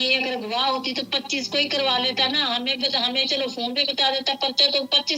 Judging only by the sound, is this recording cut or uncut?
uncut